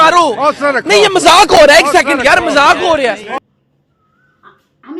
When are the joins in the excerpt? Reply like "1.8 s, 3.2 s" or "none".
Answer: 3.4 s

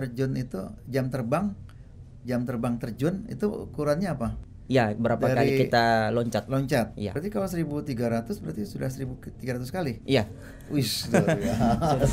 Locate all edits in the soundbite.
4.5 s, 7.1 s

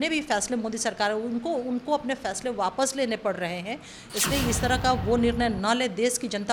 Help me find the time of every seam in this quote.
none

